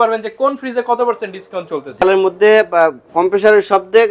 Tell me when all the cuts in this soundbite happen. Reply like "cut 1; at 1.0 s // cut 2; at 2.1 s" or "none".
cut 1; at 2.0 s

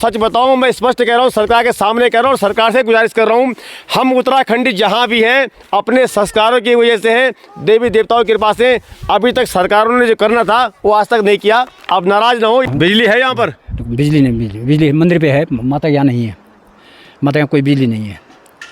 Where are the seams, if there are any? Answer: cut 1; at 12.6 s

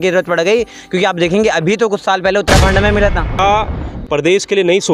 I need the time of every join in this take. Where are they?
cut 1; at 3.4 s

